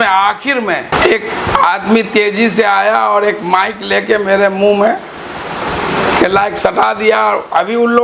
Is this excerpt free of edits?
no; 1 cut; at 0.9 s

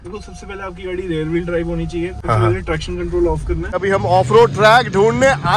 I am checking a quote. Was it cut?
yes; 2 cuts; at 2.2 s, 3.8 s

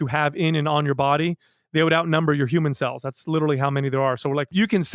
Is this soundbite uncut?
yes; 0 cuts

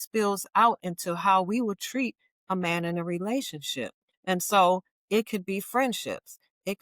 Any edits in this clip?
yes; 1 cut; at 4.1 s

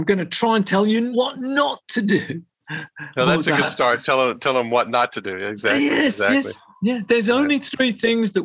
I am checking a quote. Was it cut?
yes; 2 cuts; at 1.1 s, 2.6 s

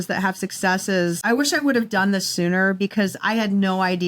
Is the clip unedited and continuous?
no; 1 cut; at 1.2 s

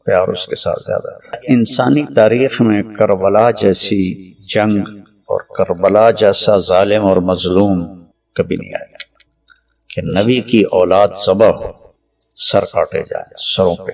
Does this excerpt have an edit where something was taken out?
yes; 1 cut; at 1.4 s

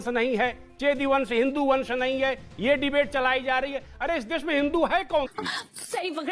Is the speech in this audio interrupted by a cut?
yes; 1 cut; at 5.3 s

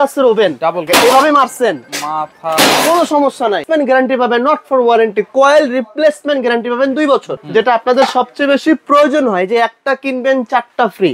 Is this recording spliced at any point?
yes; 3 cuts; at 0.9 s, 3.6 s, 7.4 s

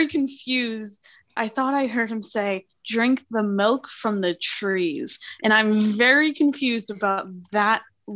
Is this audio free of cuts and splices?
no; 1 cut; at 1.3 s

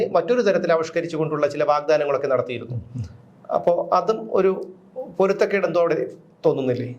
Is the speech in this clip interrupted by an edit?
no; 0 cuts

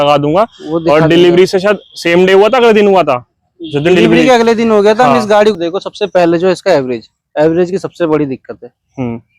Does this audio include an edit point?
yes; 1 cut; at 5.5 s

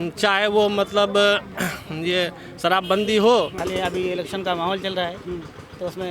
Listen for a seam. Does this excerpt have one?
yes; 1 cut; at 3.6 s

